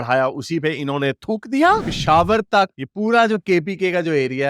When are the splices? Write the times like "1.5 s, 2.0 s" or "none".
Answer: 1.8 s

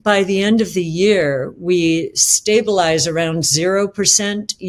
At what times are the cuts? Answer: none

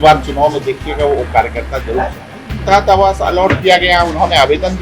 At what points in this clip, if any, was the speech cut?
2.6 s

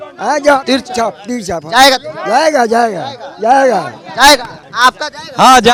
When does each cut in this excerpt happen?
none

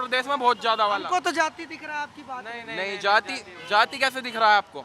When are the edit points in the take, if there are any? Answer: none

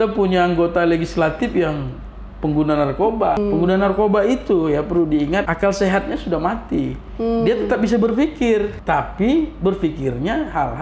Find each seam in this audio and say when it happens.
3.4 s, 5.5 s, 8.8 s

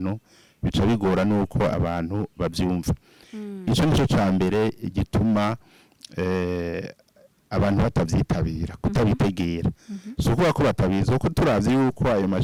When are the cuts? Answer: none

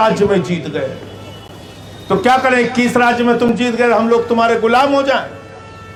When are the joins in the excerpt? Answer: none

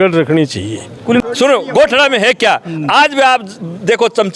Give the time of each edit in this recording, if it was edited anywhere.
1.2 s

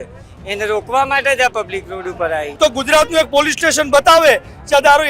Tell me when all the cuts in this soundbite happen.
2.5 s

